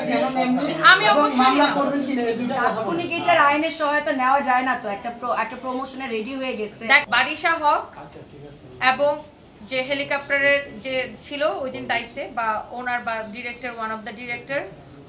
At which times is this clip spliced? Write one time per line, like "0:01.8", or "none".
0:07.0